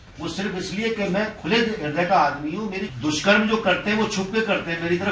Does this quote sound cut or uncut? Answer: cut